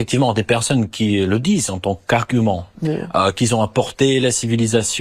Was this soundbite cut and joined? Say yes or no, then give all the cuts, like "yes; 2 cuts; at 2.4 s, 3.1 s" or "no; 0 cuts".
yes; 1 cut; at 2.7 s